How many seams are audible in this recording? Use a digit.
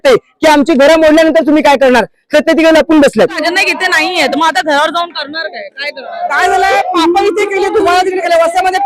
1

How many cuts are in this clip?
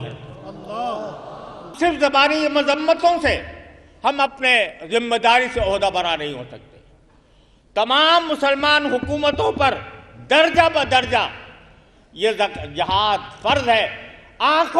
1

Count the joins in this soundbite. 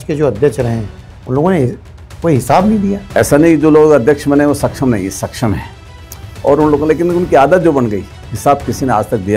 1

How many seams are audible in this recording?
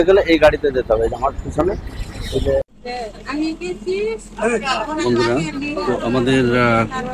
1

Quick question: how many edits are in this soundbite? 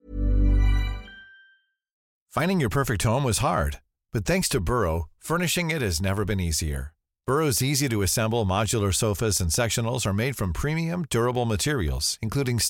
1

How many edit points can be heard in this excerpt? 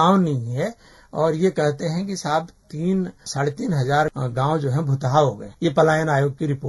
3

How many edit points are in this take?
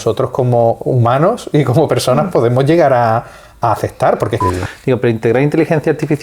1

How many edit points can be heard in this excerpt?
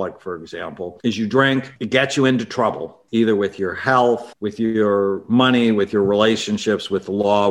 4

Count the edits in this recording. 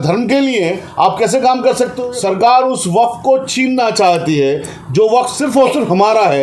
1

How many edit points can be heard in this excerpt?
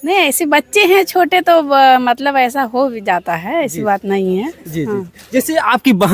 0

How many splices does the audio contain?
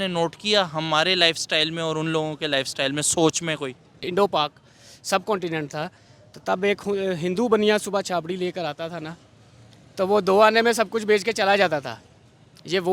1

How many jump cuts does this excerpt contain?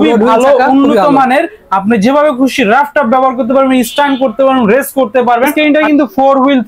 1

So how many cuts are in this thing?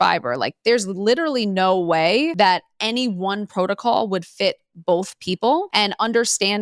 2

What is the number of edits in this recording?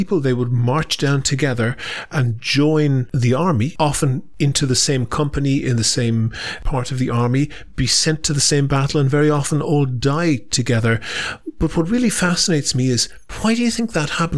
2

